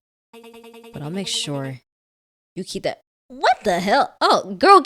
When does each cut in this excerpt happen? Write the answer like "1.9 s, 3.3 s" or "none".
none

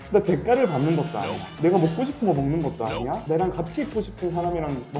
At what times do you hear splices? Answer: 1.5 s, 3.2 s

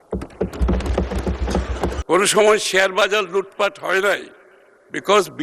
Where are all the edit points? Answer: 2.0 s

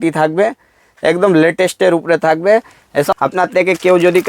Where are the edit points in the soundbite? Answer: 3.1 s

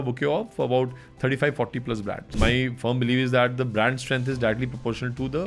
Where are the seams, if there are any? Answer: 2.3 s

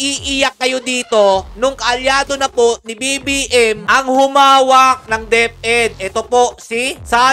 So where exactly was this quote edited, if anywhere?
none

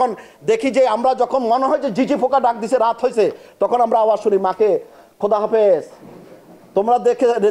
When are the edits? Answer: none

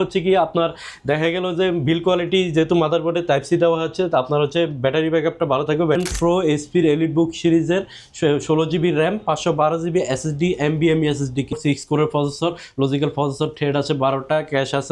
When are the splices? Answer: 6.0 s, 11.6 s

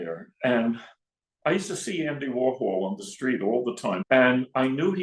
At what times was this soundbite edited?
4.0 s

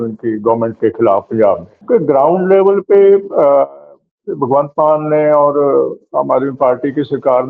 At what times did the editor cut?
1.7 s

